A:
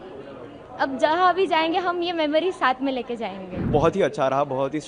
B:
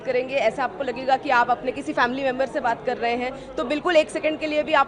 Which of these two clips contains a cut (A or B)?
A